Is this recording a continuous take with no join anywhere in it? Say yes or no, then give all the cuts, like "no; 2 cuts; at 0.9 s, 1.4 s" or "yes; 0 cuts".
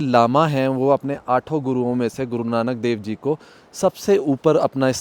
yes; 0 cuts